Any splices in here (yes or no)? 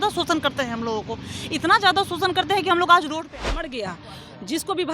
yes